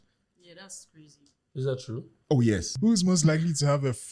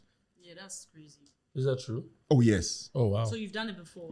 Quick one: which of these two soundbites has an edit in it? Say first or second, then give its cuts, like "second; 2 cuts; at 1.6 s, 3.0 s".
first; 1 cut; at 2.7 s